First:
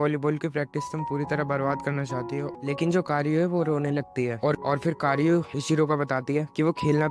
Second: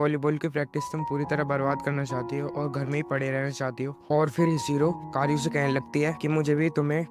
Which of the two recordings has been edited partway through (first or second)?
first